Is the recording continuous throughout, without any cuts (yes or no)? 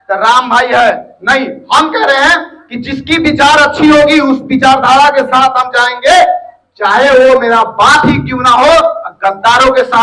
yes